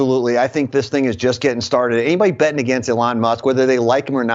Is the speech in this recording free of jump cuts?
yes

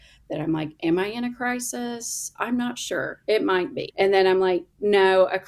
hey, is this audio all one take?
no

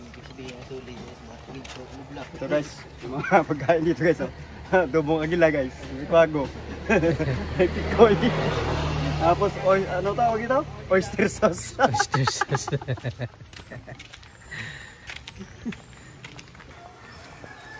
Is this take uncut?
yes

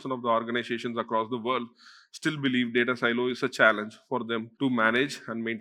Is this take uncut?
no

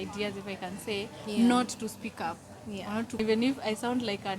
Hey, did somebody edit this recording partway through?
yes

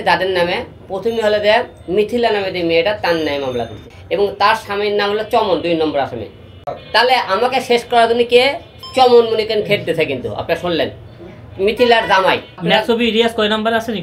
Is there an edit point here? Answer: yes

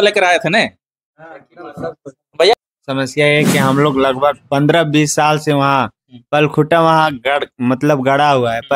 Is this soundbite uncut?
no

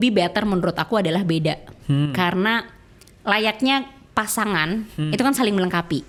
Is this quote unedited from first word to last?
yes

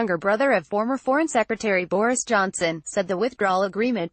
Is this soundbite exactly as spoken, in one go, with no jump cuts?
no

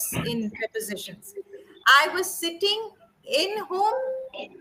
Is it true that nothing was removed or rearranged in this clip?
yes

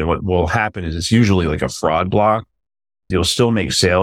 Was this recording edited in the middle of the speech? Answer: yes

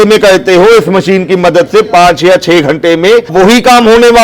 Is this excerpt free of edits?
no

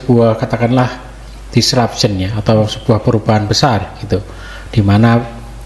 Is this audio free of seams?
yes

